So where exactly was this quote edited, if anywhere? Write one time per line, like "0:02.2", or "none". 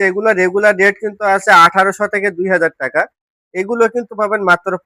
none

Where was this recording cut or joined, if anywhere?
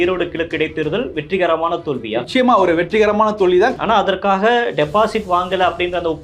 0:03.7

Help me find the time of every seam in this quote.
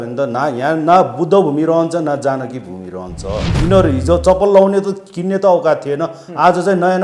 0:03.5

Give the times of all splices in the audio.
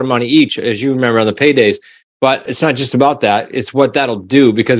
0:02.4

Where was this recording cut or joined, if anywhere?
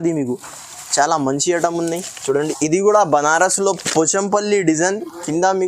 0:02.4

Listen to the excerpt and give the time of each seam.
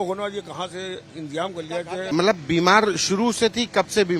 0:02.0

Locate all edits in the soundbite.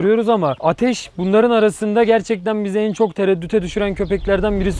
none

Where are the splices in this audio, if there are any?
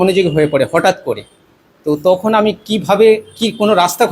none

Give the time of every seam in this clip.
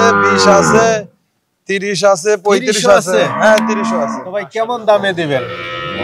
0:04.5

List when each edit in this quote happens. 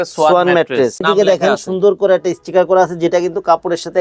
0:01.0

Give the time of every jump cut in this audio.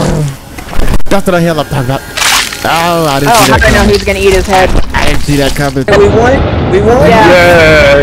0:05.9

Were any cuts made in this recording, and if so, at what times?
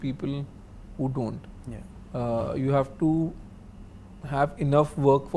none

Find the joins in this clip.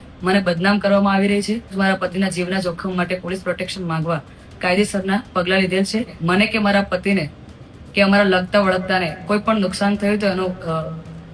0:01.8
0:06.2

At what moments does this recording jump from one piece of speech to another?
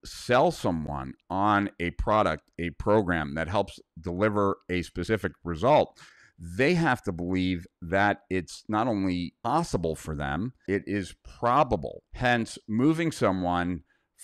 0:09.5
0:10.6
0:12.0

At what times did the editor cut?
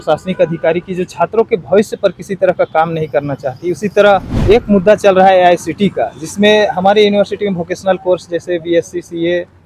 0:04.3

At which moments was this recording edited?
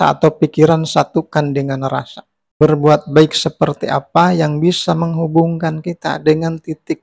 0:02.4

